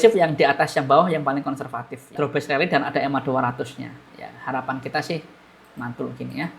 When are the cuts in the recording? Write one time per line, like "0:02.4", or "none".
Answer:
0:02.1